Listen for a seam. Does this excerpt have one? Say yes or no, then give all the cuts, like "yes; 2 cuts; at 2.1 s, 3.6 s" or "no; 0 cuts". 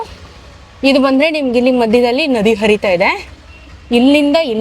no; 0 cuts